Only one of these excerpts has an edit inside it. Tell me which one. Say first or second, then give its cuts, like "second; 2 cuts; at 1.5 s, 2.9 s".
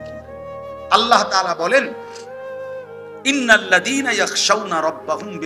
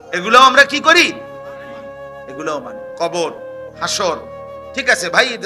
first; 3 cuts; at 0.8 s, 1.9 s, 3.1 s